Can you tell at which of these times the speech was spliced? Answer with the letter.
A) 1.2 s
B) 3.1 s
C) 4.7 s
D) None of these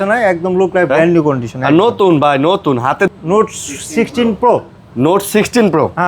B